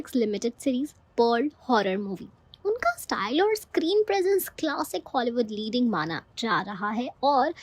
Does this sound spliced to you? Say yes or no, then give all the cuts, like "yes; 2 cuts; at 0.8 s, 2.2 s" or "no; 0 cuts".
yes; 1 cut; at 6.2 s